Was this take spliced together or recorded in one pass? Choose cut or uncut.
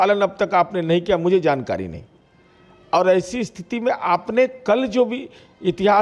uncut